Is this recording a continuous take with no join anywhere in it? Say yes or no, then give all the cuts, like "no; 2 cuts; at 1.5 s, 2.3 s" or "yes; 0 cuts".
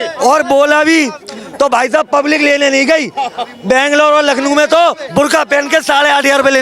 yes; 0 cuts